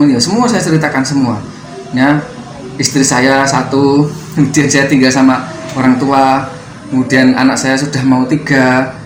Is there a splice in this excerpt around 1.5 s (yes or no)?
no